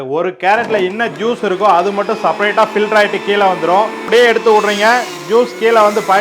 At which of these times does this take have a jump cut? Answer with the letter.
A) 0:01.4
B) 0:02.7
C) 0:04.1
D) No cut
C